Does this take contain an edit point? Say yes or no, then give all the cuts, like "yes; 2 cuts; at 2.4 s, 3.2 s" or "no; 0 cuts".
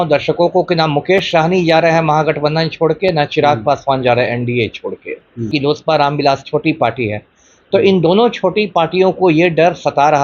yes; 1 cut; at 5.5 s